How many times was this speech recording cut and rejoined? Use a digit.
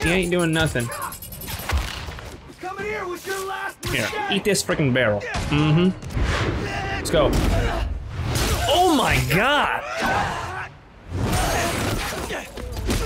1